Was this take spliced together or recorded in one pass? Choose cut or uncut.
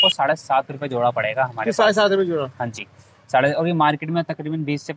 uncut